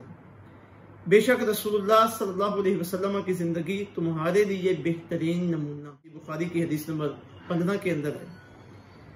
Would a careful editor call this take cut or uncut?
cut